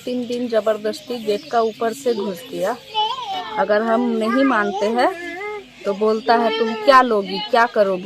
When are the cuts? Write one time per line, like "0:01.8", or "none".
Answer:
0:03.4